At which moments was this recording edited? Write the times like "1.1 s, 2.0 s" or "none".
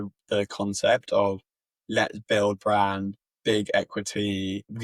none